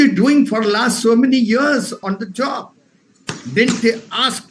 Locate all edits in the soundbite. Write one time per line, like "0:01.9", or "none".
0:02.0